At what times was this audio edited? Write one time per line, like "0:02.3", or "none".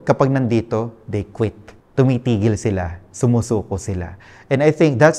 none